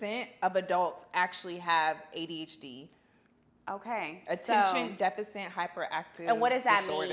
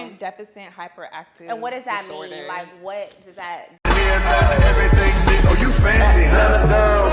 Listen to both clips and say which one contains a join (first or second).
second